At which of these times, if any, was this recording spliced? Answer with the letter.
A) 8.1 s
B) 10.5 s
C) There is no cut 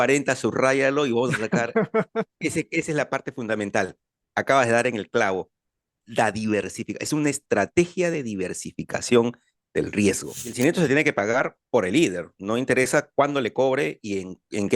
B